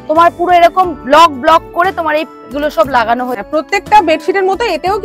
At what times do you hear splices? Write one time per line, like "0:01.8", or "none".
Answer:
0:03.3